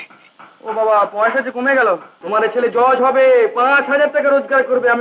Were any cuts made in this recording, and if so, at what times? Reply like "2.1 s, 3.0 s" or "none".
2.1 s